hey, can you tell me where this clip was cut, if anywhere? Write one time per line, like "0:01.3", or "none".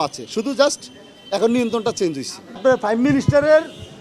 0:02.6